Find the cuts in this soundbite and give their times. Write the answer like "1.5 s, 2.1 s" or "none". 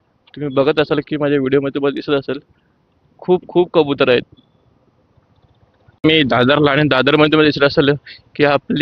6.1 s